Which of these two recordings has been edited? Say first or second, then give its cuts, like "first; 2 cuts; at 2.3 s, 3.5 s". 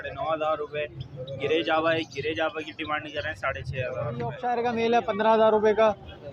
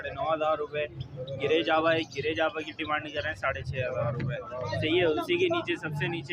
first; 1 cut; at 4.4 s